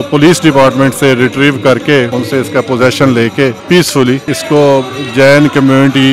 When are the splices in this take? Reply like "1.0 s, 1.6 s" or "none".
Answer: 2.1 s, 3.6 s, 4.3 s

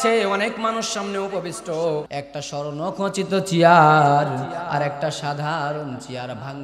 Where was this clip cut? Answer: 2.1 s

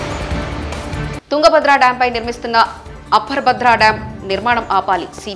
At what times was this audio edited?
0.9 s

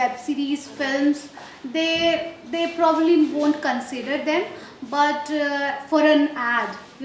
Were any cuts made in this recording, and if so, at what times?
none

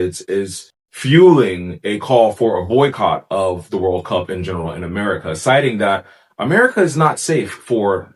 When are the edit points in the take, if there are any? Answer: none

